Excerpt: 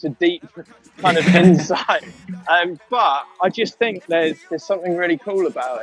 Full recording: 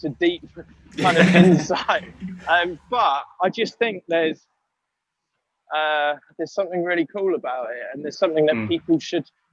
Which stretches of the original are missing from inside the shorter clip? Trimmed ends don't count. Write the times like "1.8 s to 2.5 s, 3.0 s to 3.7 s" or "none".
4.4 s to 6.3 s